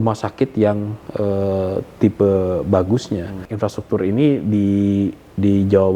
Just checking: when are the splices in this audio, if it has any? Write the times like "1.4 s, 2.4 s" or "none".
3.4 s

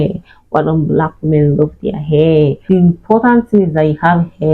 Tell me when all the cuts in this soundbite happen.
2.6 s

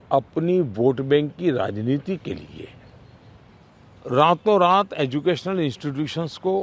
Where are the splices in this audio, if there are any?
3.4 s

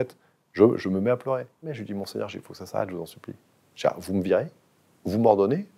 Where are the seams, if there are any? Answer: 1.8 s

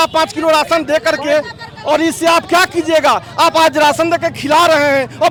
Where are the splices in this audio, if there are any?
none

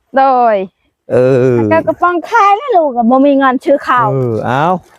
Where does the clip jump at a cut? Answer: none

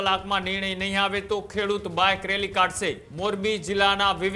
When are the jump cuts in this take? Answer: 3.1 s

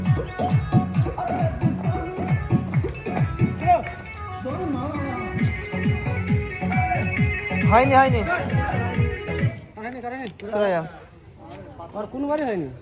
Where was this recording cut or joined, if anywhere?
none

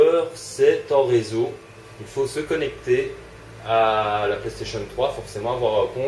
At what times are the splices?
none

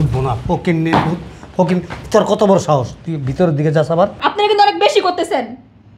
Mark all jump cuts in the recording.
none

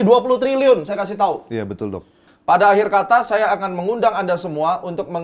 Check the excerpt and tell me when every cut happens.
2.2 s

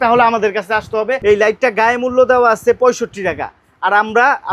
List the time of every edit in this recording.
1.2 s

